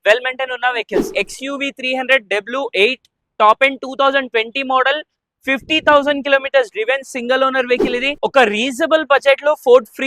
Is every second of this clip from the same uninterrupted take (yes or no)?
no